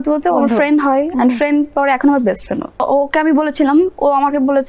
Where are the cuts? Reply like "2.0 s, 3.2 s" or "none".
2.8 s